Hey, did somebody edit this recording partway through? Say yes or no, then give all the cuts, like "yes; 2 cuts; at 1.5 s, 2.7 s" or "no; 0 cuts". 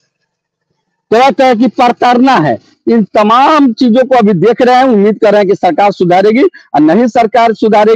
no; 0 cuts